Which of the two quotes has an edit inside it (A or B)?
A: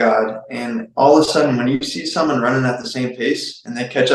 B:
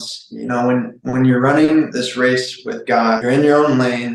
B